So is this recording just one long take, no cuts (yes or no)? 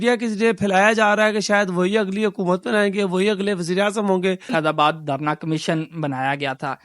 no